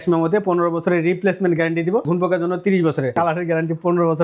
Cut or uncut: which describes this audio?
cut